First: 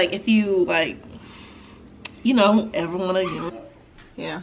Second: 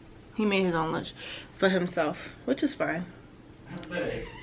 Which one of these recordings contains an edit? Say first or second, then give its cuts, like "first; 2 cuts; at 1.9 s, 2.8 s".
first; 1 cut; at 3.5 s